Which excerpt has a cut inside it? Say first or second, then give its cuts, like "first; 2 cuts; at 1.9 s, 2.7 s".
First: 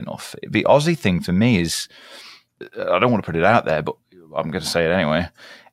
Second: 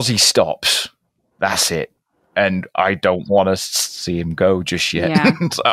first; 1 cut; at 2.6 s